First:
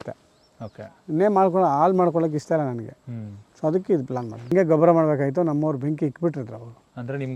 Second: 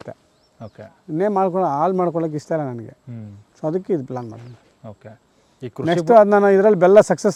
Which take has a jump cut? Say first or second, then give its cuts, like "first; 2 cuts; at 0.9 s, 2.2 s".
first; 1 cut; at 4.4 s